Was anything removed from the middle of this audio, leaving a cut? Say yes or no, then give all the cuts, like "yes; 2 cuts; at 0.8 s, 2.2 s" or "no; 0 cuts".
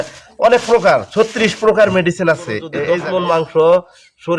yes; 1 cut; at 2.7 s